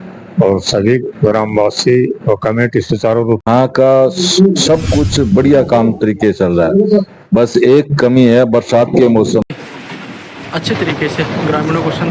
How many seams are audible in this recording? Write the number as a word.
two